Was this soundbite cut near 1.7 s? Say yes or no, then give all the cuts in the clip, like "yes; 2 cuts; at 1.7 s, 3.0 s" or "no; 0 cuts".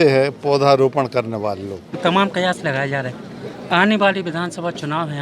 yes; 1 cut; at 1.7 s